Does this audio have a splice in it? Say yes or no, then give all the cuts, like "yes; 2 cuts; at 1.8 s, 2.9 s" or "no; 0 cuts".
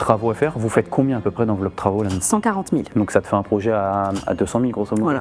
yes; 1 cut; at 2.9 s